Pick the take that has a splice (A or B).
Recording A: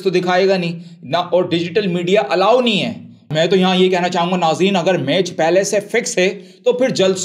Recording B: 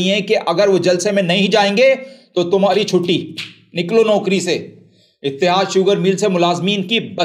A